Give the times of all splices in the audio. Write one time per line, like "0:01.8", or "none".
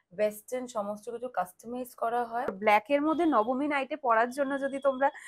0:02.5